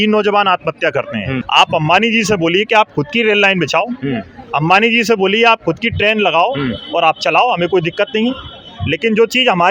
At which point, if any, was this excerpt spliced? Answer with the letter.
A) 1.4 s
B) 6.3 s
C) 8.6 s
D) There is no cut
A